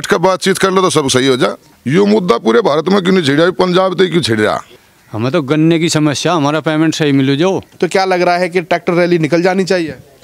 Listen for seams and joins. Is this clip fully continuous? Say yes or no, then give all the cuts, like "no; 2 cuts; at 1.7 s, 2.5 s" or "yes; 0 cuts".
no; 3 cuts; at 1.7 s, 4.7 s, 7.7 s